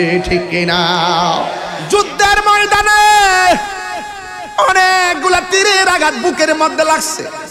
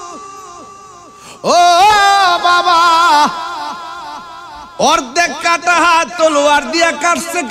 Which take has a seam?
first; 1 cut; at 1.7 s

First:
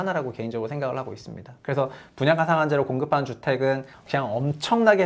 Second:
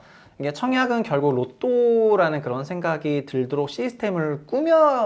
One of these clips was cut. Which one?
first; 1 cut; at 4.0 s

